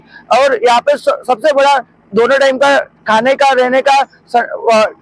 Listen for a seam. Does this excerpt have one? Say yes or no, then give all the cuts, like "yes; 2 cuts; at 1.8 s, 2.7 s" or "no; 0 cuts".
no; 0 cuts